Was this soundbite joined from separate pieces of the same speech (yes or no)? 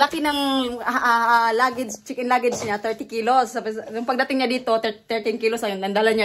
no